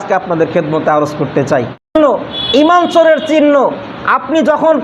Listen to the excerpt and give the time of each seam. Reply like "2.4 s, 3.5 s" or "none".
1.9 s